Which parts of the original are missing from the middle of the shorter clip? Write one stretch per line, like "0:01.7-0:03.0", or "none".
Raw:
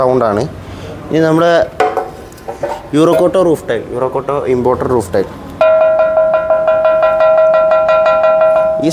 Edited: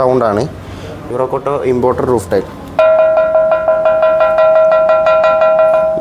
0:01.0-0:03.8